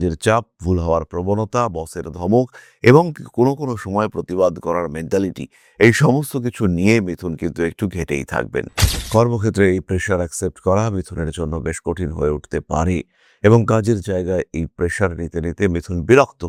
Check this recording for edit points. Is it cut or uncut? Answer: uncut